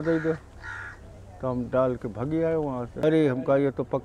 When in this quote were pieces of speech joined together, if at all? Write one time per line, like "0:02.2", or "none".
0:02.9